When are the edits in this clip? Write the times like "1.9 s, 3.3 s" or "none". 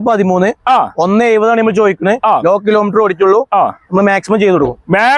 none